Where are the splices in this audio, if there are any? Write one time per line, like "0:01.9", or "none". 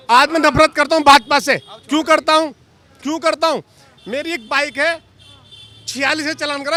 none